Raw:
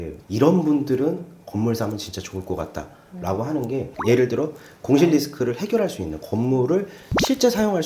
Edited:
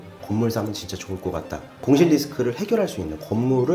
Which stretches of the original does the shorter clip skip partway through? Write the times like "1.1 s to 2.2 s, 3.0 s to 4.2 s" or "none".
2.9 s to 4.7 s